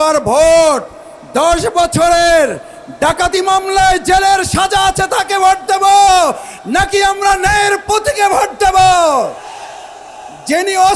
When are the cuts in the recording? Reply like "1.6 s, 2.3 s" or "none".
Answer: none